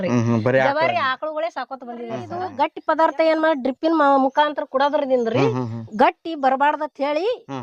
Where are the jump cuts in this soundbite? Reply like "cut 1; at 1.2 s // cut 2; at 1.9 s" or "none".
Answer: cut 1; at 2.4 s